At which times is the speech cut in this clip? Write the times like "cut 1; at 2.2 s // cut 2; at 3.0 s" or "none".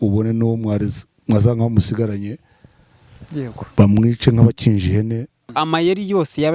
cut 1; at 5.5 s